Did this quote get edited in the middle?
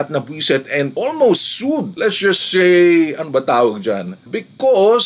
yes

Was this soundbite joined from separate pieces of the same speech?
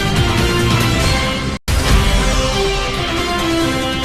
yes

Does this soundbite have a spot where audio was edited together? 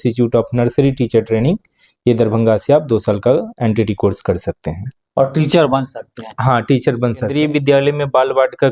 yes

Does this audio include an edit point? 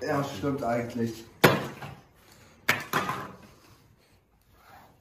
no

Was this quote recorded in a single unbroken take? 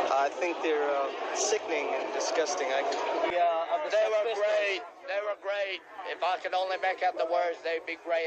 yes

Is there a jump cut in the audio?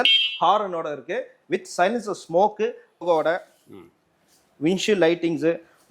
yes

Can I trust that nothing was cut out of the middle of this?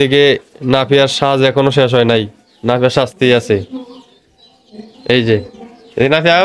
yes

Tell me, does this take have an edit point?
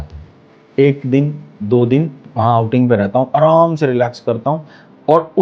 no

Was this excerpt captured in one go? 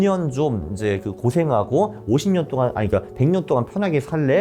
yes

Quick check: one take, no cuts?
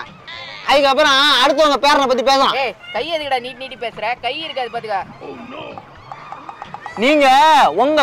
yes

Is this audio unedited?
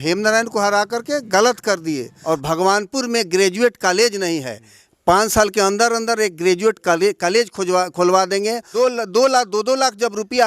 no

